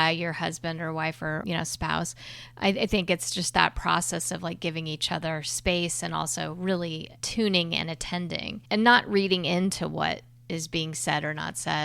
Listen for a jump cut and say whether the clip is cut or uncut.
cut